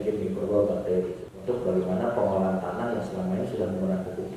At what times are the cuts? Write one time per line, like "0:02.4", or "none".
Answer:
0:01.2